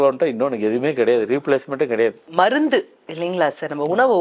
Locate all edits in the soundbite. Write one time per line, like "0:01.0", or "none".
0:02.2